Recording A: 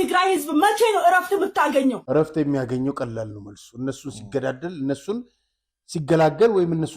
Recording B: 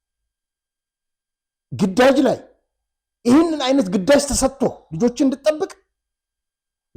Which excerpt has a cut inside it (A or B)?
A